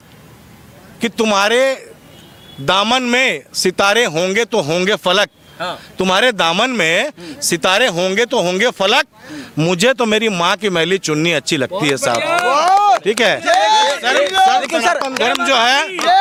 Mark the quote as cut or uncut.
uncut